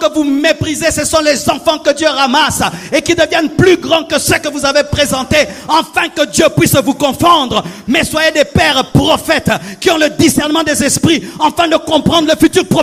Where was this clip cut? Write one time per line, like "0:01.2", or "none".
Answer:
none